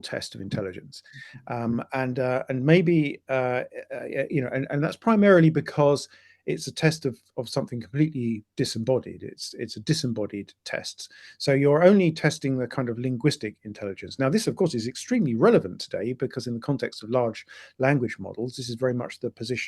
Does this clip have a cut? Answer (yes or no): no